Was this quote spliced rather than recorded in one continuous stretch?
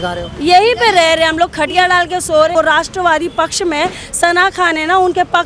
yes; 1 cut; at 2.5 s

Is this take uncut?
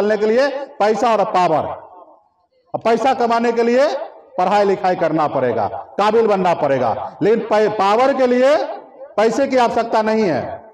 yes; 0 cuts

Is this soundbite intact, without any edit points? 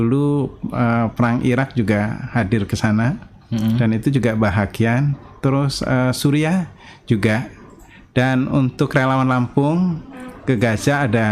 yes; 0 cuts

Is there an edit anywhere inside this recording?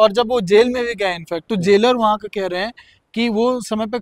no; 0 cuts

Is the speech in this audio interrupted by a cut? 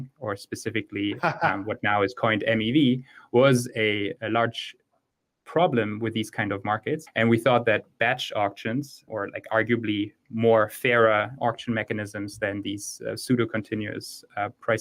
yes; 1 cut; at 7.1 s

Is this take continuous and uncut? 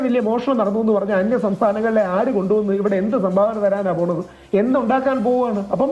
yes; 0 cuts

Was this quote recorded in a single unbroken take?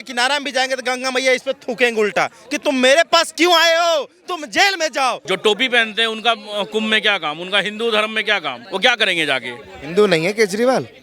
no; 2 cuts; at 5.2 s, 8.6 s

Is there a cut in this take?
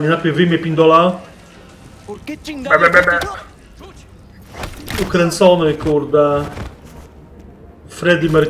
no; 0 cuts

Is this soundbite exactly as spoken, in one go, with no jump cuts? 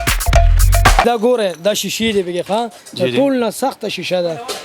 no; 1 cut; at 1.0 s

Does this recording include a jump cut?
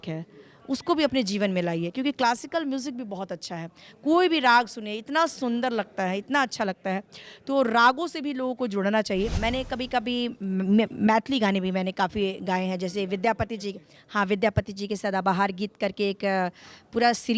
yes; 1 cut; at 9.4 s

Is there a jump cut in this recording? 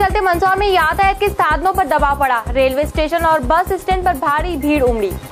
no; 0 cuts

